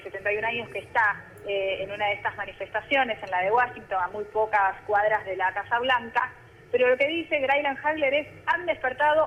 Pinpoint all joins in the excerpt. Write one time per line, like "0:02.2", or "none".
none